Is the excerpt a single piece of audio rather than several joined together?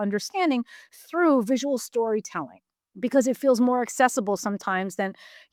yes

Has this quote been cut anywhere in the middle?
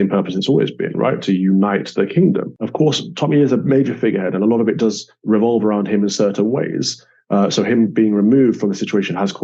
yes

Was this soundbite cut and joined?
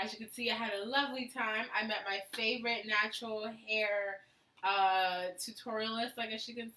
yes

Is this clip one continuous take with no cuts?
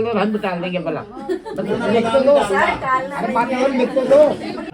yes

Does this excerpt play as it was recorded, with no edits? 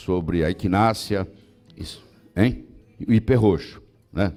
yes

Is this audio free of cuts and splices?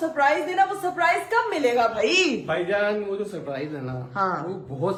yes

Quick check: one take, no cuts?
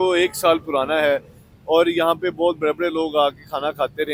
yes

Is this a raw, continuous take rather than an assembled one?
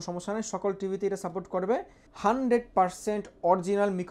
no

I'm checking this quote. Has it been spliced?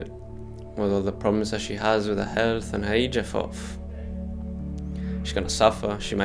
no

